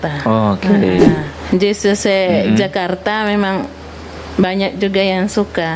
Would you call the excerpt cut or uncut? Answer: cut